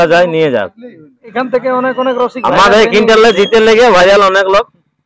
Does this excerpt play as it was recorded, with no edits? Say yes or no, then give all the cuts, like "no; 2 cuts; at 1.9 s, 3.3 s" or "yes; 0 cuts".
no; 1 cut; at 1.3 s